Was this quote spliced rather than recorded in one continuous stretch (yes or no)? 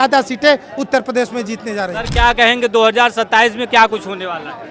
no